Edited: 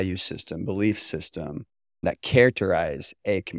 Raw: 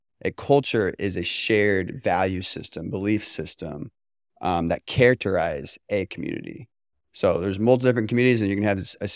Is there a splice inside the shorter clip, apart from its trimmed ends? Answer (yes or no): yes